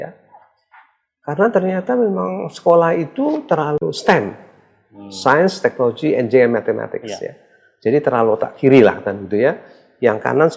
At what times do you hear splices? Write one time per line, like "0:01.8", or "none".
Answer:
none